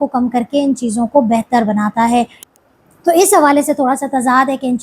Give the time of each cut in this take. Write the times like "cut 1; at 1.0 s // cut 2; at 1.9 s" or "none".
cut 1; at 2.4 s